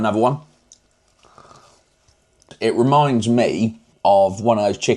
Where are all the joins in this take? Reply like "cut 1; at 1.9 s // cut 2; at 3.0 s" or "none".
cut 1; at 2.4 s // cut 2; at 3.9 s